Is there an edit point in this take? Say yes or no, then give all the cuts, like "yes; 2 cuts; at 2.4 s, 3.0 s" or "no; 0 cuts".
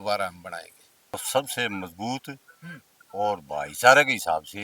yes; 1 cut; at 1.2 s